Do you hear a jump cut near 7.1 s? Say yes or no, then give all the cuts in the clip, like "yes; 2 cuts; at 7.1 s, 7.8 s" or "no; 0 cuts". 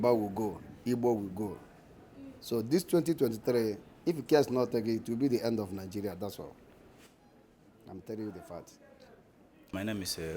no; 0 cuts